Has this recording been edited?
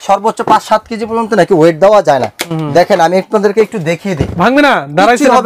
no; 0 cuts

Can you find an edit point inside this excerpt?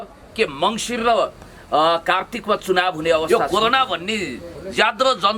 yes; 1 cut; at 3.3 s

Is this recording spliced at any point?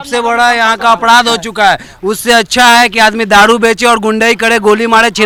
no; 0 cuts

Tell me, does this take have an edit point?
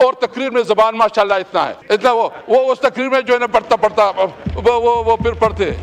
yes; 1 cut; at 1.8 s

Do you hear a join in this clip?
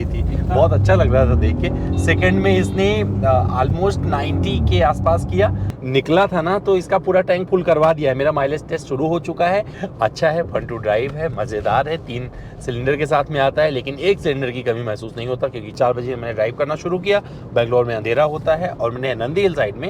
yes; 3 cuts; at 5.6 s, 9.8 s, 15.7 s

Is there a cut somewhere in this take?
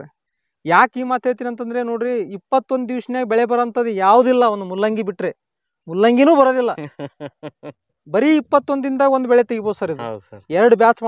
no; 0 cuts

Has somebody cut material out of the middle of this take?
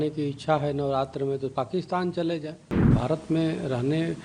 yes; 1 cut; at 2.9 s

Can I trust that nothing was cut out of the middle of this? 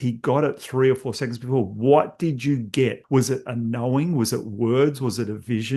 no; 1 cut; at 3.0 s

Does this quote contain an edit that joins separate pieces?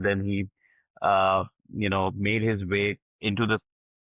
no; 0 cuts

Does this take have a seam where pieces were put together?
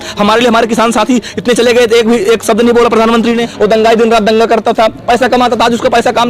yes; 1 cut; at 3.5 s

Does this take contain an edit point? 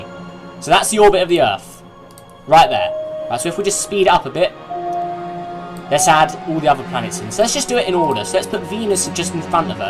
yes; 1 cut; at 4.5 s

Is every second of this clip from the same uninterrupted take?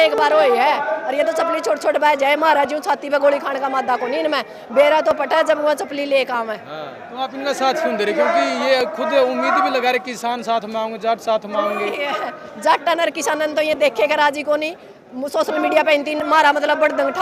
yes; 0 cuts

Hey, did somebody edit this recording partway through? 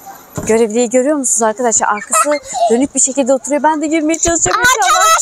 no; 0 cuts

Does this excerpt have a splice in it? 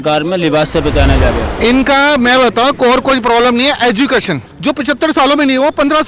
yes; 2 cuts; at 1.5 s, 4.5 s

